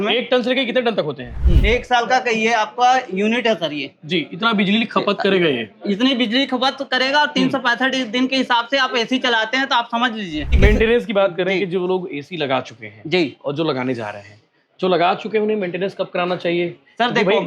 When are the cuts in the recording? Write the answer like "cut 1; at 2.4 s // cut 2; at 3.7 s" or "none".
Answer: cut 1; at 1.4 s // cut 2; at 10.5 s